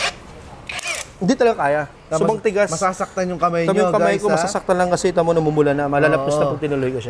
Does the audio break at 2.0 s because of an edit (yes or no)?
no